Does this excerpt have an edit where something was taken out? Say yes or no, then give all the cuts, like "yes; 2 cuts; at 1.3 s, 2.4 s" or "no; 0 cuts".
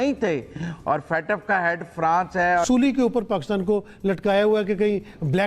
yes; 1 cut; at 2.7 s